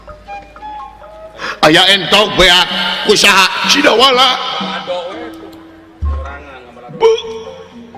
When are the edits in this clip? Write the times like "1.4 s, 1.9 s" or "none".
none